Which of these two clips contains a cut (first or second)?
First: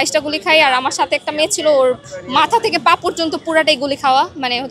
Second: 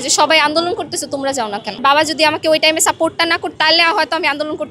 second